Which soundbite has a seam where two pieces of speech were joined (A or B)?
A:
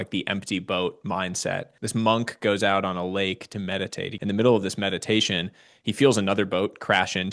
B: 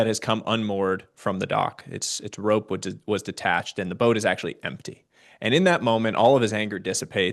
A